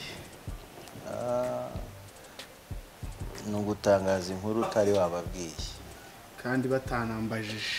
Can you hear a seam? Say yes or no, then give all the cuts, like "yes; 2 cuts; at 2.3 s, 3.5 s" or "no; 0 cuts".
no; 0 cuts